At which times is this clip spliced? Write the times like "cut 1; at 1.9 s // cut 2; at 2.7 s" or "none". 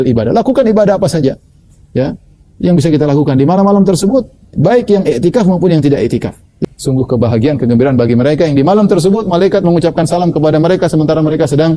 cut 1; at 6.5 s